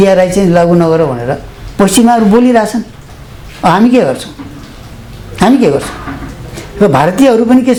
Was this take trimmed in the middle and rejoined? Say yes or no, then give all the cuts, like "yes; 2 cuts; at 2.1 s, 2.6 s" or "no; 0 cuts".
no; 0 cuts